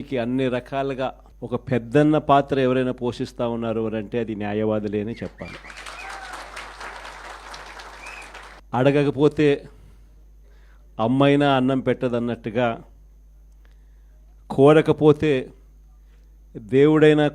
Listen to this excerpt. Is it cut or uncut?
cut